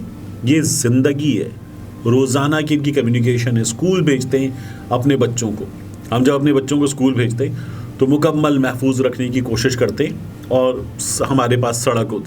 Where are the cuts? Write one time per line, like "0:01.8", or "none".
none